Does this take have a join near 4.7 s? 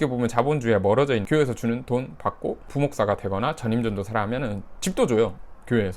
no; 2 cuts; at 1.2 s, 2.7 s

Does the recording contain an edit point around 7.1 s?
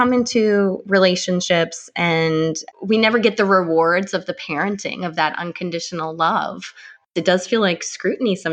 yes; 2 cuts; at 2.6 s, 7.1 s

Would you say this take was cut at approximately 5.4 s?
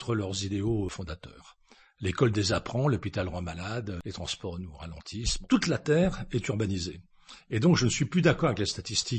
yes; 3 cuts; at 0.9 s, 4.0 s, 5.4 s

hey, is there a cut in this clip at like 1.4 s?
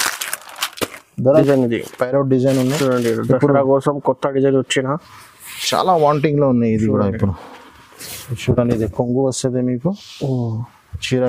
yes; 1 cut; at 1.4 s

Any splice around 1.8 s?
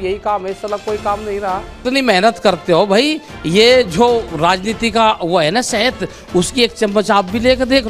yes; 1 cut; at 1.8 s

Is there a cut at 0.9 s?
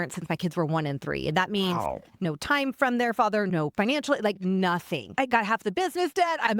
no; 2 cuts; at 2.2 s, 5.1 s

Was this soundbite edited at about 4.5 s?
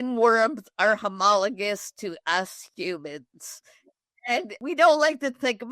yes; 1 cut; at 4.5 s

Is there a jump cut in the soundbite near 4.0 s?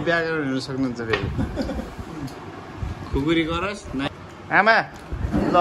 yes; 1 cut; at 4.0 s

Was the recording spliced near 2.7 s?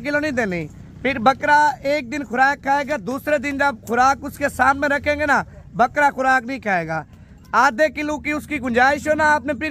no; 0 cuts

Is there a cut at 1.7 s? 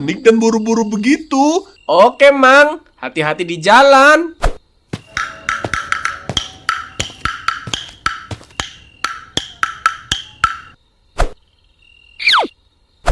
yes; 1 cut; at 1.7 s

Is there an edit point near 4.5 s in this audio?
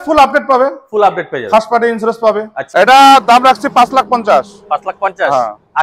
no; 1 cut; at 2.6 s

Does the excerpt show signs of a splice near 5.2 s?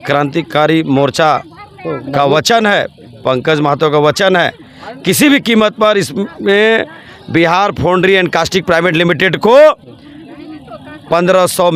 no; 0 cuts

